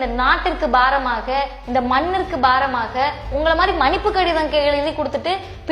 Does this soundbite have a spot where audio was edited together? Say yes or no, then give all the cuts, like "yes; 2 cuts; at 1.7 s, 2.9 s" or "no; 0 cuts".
yes; 1 cut; at 3.3 s